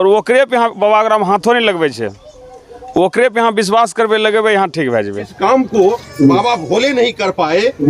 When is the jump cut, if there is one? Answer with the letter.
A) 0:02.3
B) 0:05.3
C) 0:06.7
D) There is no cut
B